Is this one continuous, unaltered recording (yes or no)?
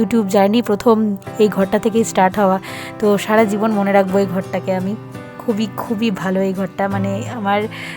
yes